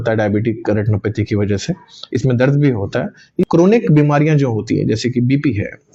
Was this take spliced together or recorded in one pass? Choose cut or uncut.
cut